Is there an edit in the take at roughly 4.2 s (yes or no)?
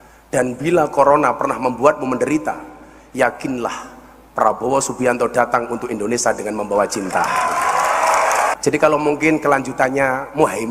no